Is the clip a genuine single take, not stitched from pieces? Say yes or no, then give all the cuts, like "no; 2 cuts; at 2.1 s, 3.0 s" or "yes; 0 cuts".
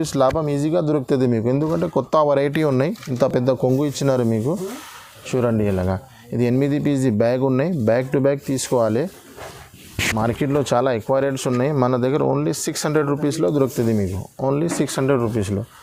yes; 0 cuts